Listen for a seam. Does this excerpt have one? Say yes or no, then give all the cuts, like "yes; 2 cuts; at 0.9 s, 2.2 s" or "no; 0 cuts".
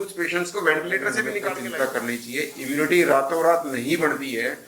yes; 1 cut; at 1.6 s